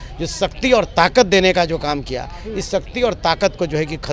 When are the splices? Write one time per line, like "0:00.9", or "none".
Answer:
none

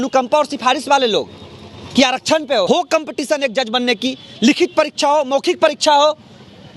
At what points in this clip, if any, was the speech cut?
0:02.7

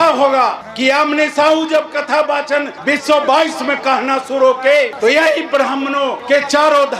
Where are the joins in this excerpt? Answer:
none

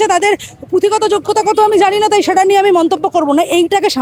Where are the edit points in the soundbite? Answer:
none

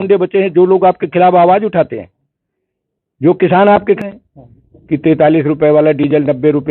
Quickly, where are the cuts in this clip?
0:04.0

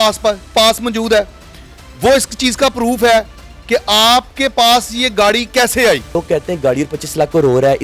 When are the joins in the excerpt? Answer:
0:06.2

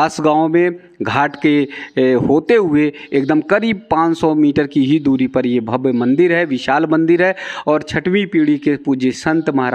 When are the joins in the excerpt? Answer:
none

